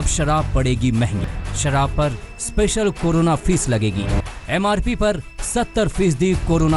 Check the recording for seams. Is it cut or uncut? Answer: cut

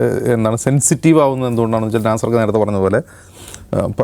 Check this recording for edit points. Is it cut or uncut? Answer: uncut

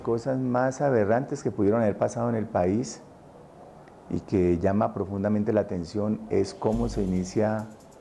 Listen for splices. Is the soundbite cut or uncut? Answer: uncut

